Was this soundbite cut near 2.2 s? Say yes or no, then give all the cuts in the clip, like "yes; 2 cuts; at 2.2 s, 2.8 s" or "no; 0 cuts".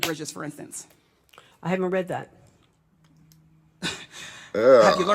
no; 0 cuts